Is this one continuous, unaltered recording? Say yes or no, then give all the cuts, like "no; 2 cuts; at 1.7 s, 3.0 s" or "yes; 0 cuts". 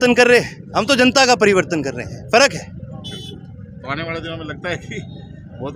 yes; 0 cuts